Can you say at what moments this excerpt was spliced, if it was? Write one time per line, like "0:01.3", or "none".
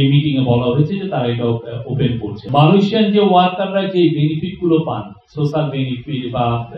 0:02.4